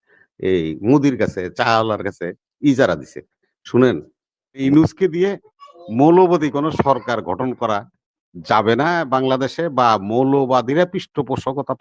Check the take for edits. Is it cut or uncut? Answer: cut